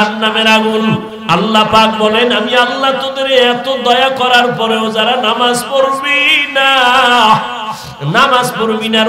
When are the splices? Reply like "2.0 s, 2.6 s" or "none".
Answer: 1.1 s